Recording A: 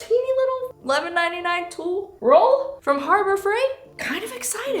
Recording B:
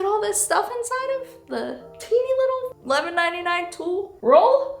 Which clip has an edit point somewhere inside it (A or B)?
A